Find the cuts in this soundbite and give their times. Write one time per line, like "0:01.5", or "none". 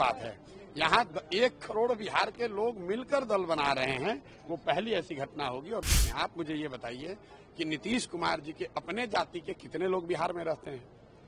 0:05.8